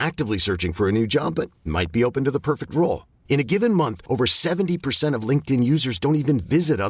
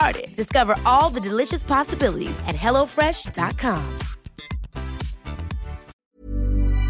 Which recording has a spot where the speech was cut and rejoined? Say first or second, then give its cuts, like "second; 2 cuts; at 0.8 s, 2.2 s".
second; 1 cut; at 5.9 s